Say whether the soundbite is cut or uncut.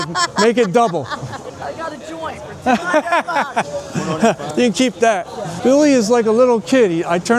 cut